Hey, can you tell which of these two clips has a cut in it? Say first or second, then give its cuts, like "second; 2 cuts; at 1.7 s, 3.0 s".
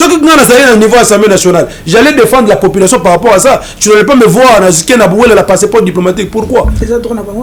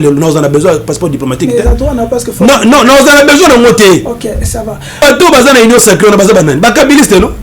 second; 1 cut; at 4.9 s